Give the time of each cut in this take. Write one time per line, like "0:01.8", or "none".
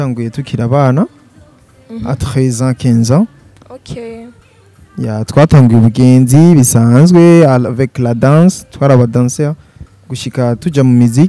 none